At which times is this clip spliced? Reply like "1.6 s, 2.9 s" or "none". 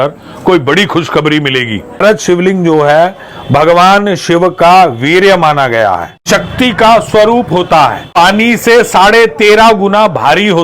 2.0 s, 6.1 s, 8.1 s